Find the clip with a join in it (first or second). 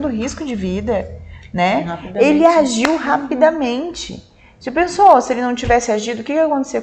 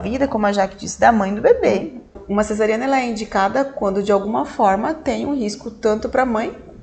second